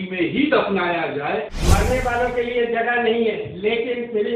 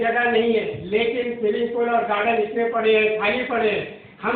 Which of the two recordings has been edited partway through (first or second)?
first